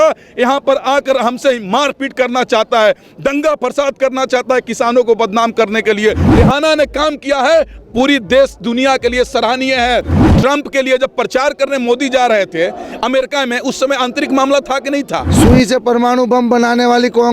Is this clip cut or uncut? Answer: cut